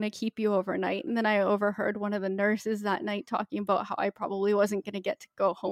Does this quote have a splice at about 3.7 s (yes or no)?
no